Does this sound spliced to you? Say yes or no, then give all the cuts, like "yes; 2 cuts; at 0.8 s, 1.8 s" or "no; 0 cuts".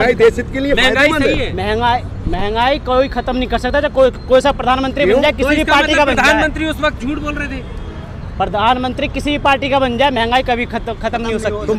no; 0 cuts